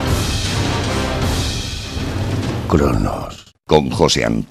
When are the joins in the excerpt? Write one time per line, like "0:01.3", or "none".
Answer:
0:01.5